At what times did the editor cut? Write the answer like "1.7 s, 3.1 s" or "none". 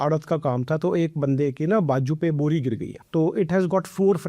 2.9 s